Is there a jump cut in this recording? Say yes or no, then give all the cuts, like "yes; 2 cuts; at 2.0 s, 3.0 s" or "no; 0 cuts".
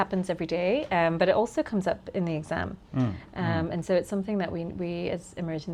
no; 0 cuts